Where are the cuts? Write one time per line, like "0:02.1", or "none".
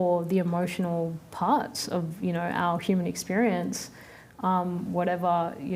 none